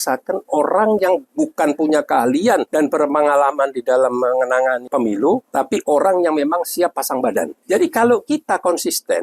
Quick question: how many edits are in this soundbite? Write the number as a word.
four